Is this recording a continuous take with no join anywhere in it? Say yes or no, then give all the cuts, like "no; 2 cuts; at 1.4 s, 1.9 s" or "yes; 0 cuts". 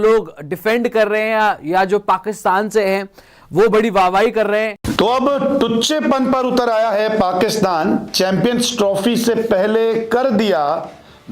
no; 1 cut; at 4.8 s